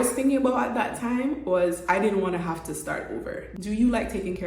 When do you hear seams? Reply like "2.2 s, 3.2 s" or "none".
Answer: 3.4 s